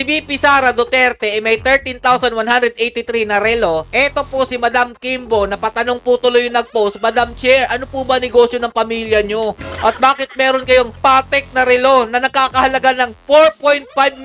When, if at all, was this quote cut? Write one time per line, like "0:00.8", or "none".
none

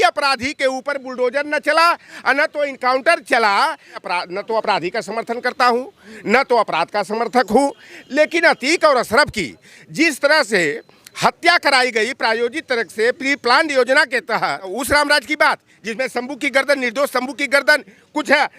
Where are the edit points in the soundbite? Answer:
0:04.0
0:14.7

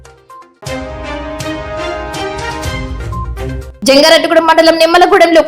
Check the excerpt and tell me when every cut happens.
0:03.5

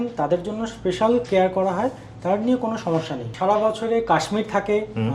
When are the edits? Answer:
0:03.2

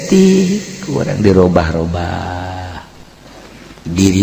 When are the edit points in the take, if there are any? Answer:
none

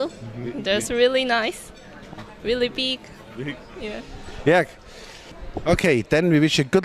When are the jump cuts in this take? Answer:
0:01.2

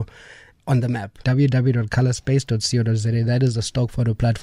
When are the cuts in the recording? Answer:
0:01.2

